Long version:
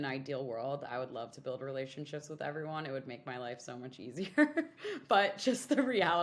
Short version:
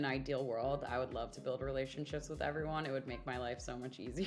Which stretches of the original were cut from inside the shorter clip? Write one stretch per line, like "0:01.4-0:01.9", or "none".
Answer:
none